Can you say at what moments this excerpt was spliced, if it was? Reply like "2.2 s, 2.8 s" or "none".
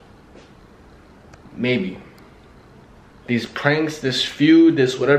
3.1 s